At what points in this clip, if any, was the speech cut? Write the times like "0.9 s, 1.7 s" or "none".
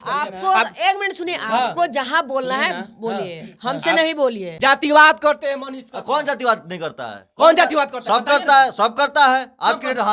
4.5 s